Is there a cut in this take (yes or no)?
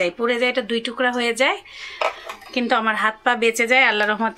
no